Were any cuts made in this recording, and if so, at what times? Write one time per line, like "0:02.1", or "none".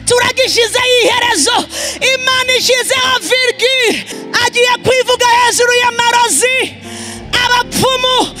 0:04.1